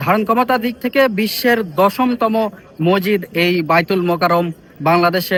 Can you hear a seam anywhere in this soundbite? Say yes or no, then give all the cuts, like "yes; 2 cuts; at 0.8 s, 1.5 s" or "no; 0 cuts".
no; 0 cuts